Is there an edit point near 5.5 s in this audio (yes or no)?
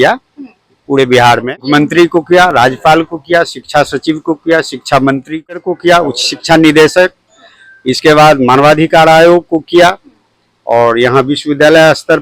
yes